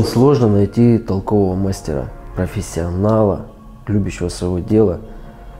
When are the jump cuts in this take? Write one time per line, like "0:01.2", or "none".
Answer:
0:02.2